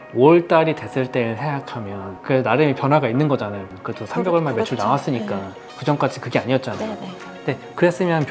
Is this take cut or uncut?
cut